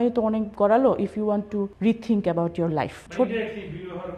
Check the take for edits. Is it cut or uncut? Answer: cut